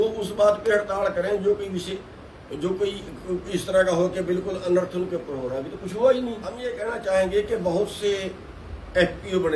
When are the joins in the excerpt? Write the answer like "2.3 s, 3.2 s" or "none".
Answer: 6.5 s